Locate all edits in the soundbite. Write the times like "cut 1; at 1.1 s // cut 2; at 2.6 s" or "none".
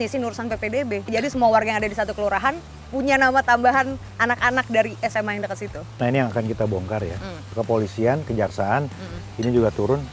none